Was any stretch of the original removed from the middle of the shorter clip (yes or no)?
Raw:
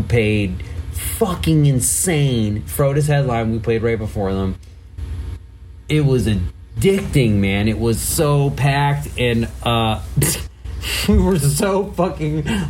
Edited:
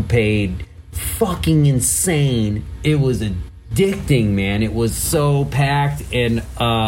yes